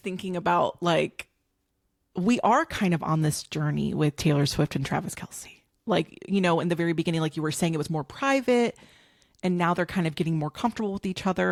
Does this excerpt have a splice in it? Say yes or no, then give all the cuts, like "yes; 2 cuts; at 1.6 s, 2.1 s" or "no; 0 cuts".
no; 0 cuts